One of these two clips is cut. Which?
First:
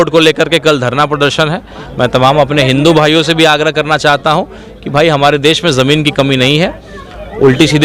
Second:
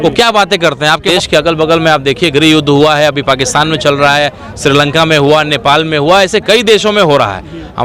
second; 1 cut; at 1.1 s

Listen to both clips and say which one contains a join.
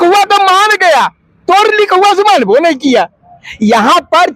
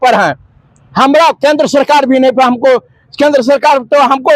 first; 1 cut; at 3.3 s

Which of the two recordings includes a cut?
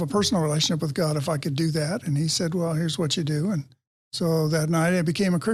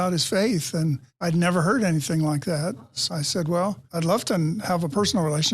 second; 1 cut; at 1.1 s

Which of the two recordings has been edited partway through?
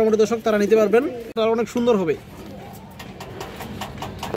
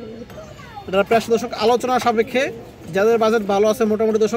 first; 1 cut; at 1.4 s

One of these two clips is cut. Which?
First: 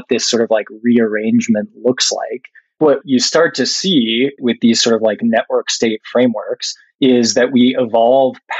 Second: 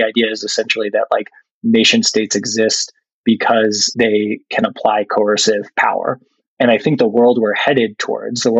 first; 2 cuts; at 2.8 s, 4.4 s

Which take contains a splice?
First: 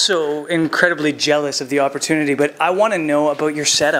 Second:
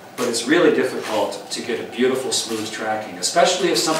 first; 1 cut; at 2.2 s

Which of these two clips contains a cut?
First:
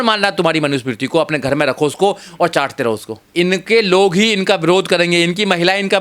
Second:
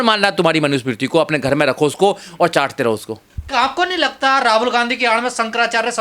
first; 1 cut; at 3.3 s

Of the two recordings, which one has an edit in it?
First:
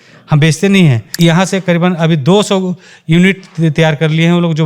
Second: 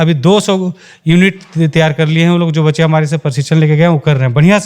first; 1 cut; at 1.1 s

